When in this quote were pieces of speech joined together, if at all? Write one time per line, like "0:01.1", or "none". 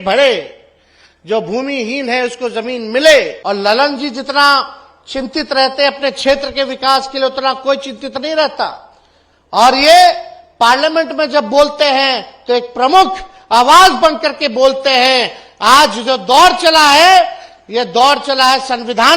0:03.4